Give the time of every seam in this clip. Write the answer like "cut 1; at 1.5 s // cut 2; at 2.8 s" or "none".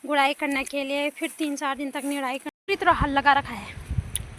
cut 1; at 2.5 s